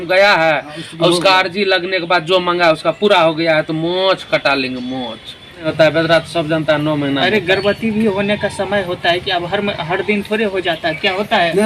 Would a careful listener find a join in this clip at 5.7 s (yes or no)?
yes